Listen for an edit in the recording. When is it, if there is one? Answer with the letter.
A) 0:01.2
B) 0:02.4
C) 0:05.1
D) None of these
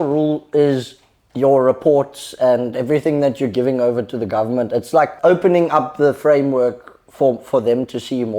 C